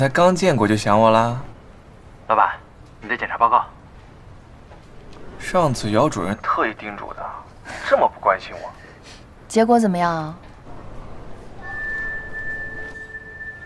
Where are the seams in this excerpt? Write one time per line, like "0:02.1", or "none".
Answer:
0:05.1